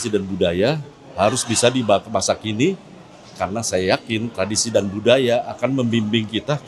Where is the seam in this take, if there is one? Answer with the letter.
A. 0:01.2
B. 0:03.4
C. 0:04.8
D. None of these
D